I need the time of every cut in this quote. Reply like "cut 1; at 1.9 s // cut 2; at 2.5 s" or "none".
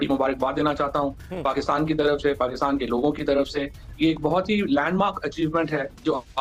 none

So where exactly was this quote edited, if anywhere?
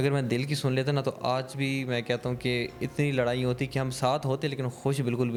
none

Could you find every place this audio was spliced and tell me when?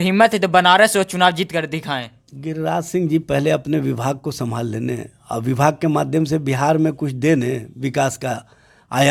none

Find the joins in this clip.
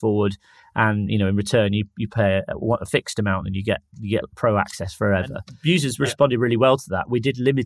cut 1; at 5.5 s

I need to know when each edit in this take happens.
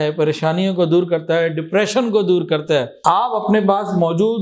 cut 1; at 2.9 s

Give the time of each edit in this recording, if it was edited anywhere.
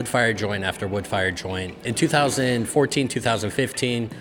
cut 1; at 1.9 s

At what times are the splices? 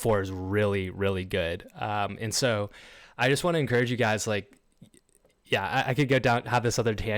none

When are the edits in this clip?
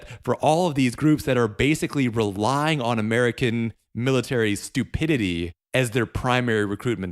cut 1; at 5.6 s

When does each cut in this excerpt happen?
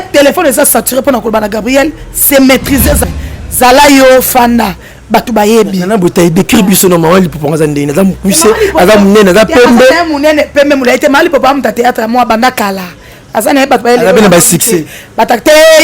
cut 1; at 3.0 s

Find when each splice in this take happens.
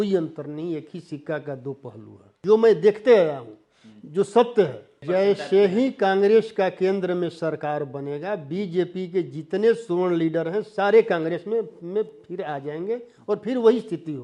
cut 1; at 2.3 s // cut 2; at 4.9 s

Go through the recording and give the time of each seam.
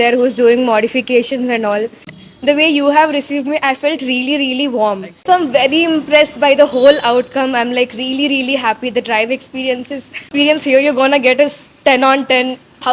cut 1; at 2.2 s // cut 2; at 5.2 s // cut 3; at 10.3 s

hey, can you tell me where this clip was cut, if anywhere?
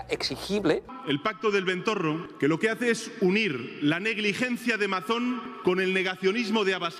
cut 1; at 0.9 s // cut 2; at 2.3 s // cut 3; at 5.5 s

